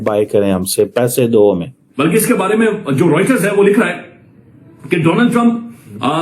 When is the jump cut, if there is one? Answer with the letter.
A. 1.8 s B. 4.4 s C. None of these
A